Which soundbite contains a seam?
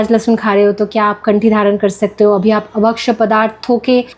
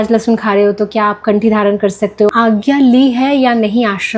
second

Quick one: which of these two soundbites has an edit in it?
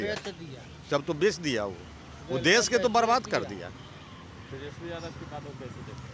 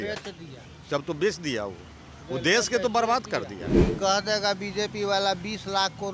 second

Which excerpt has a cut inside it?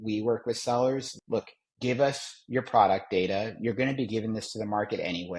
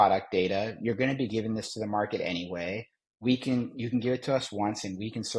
first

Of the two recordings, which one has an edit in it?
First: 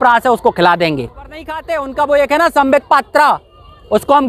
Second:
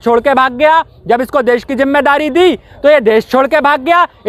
first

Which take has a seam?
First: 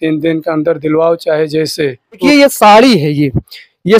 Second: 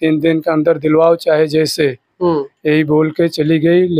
first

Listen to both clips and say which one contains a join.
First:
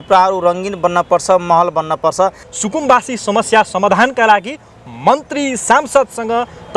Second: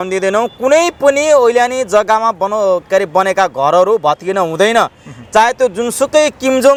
first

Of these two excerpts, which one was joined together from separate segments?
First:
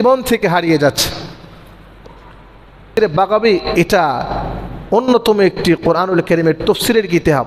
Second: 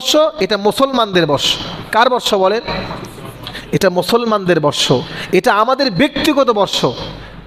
first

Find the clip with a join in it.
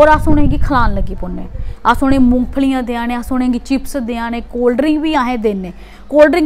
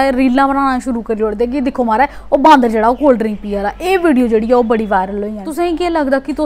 second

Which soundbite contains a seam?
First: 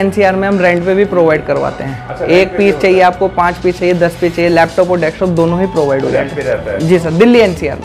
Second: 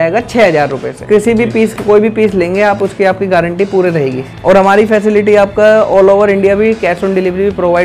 second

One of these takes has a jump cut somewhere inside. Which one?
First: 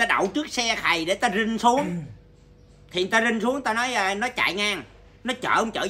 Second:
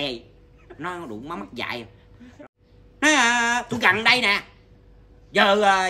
second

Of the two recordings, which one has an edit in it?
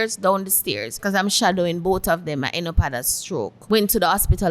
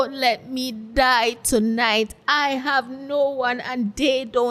first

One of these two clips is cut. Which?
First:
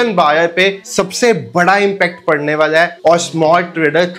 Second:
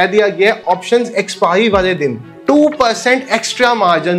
first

